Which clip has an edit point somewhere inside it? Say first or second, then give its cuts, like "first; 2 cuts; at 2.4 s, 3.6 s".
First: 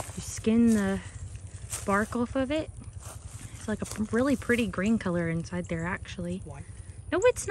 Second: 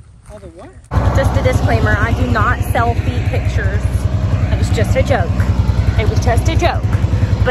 second; 1 cut; at 1.0 s